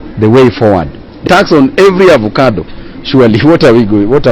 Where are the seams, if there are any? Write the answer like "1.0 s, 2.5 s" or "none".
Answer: 1.3 s